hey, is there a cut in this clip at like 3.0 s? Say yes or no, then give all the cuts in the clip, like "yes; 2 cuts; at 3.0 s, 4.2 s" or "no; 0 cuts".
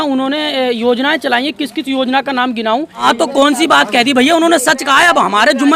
yes; 1 cut; at 3.0 s